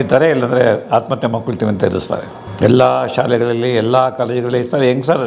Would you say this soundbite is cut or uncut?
cut